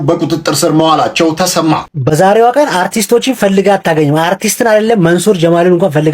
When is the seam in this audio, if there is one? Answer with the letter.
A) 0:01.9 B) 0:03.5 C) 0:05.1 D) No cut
A